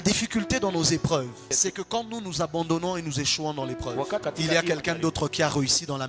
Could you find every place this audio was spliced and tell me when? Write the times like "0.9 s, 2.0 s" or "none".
1.4 s, 4.2 s